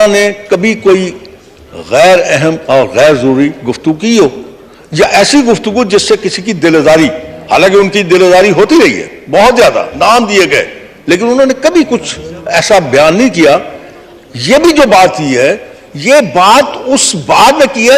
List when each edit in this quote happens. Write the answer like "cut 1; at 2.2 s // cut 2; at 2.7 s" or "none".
none